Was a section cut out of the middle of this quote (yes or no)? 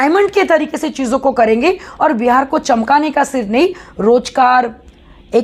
no